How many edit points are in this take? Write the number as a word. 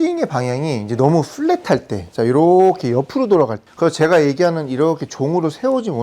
one